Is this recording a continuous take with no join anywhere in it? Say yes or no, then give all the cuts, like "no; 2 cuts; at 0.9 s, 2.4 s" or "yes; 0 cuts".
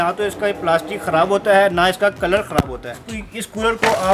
no; 1 cut; at 3.0 s